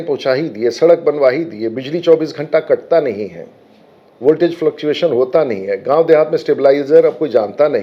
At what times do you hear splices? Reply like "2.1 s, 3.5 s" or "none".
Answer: none